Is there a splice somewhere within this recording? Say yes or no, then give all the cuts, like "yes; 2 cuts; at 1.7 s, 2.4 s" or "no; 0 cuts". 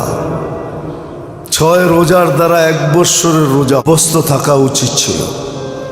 yes; 1 cut; at 3.8 s